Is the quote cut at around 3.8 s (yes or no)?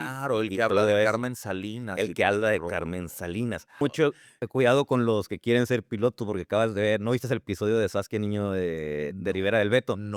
yes